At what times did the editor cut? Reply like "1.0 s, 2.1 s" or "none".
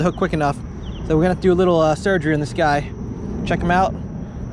none